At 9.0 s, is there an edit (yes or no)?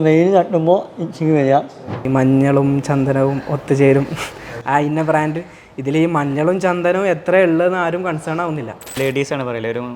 yes